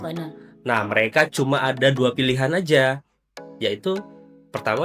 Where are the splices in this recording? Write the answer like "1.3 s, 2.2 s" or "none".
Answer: none